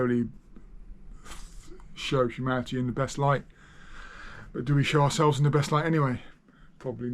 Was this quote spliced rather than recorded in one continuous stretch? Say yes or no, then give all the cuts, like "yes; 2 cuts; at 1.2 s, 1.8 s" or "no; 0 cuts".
no; 0 cuts